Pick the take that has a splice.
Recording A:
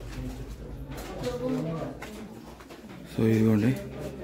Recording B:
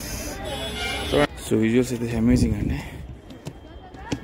B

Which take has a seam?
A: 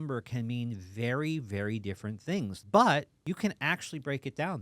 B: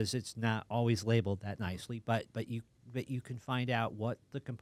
A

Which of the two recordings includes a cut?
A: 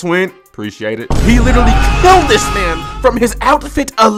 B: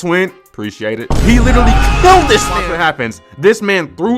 B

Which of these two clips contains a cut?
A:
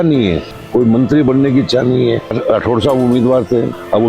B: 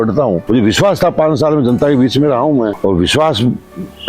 A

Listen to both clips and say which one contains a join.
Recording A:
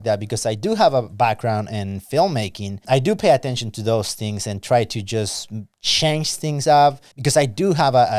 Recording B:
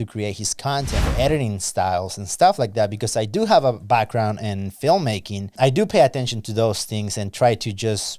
B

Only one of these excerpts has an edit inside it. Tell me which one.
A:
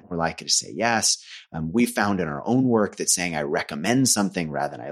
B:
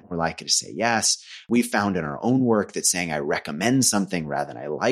B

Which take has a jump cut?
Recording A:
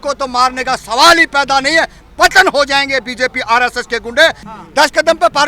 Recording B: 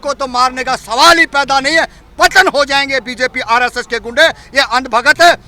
A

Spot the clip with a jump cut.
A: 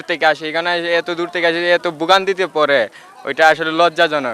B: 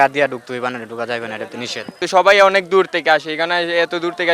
B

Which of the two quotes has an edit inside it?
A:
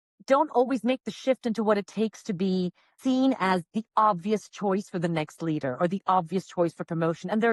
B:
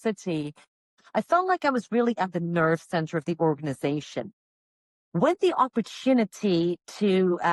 B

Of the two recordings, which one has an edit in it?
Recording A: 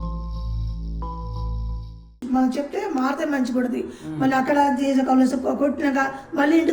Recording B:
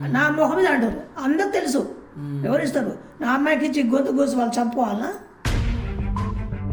A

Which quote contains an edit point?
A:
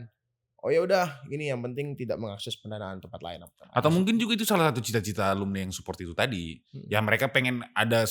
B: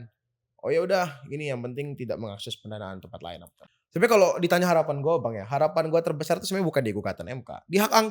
B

